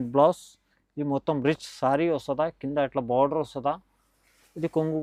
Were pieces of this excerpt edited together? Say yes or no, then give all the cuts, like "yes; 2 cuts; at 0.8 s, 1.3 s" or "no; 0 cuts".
no; 0 cuts